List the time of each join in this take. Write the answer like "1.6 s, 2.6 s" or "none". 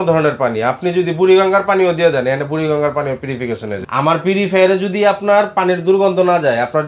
3.7 s